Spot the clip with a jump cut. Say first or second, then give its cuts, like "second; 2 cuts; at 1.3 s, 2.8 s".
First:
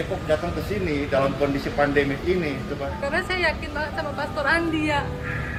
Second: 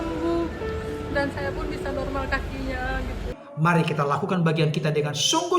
second; 1 cut; at 3.3 s